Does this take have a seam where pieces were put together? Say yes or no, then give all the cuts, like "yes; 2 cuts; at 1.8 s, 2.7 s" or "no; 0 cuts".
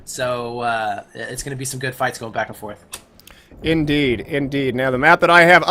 no; 0 cuts